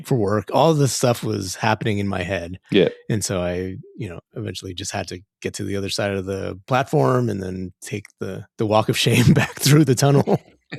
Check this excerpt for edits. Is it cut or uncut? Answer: uncut